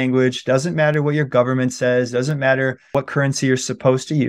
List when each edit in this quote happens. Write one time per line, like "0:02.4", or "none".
0:02.9